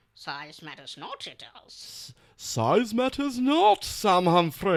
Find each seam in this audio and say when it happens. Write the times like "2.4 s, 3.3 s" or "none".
none